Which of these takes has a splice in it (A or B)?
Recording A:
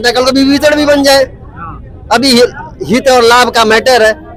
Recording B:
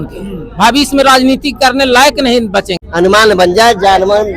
B